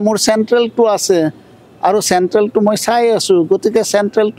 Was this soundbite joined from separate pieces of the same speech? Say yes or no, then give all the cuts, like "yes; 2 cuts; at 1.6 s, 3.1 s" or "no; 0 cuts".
no; 0 cuts